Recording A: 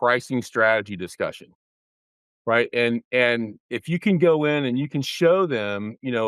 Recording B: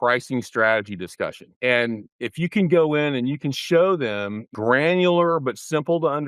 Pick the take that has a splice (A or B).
B